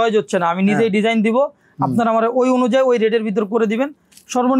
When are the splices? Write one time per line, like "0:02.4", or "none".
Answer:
none